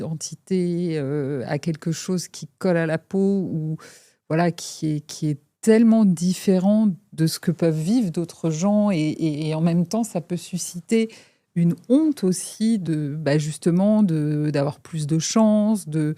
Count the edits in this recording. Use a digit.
1